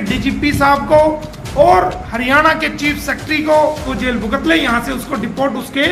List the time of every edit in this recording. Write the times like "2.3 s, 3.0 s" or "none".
2.0 s, 3.9 s